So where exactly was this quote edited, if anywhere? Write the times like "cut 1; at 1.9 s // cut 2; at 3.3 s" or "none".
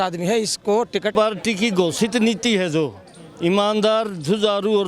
cut 1; at 1.1 s